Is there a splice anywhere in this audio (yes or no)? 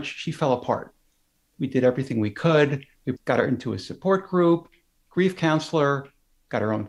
yes